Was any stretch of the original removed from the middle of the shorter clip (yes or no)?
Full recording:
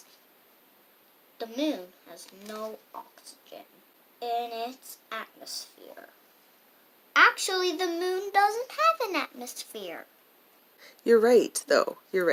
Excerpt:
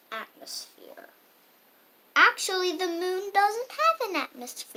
no